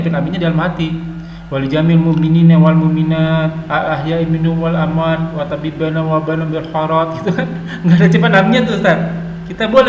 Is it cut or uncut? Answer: uncut